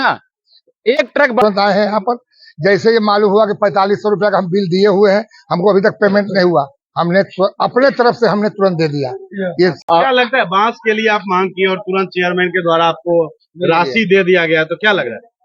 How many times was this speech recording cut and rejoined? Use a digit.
2